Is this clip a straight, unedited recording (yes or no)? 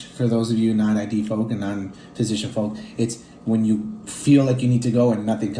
yes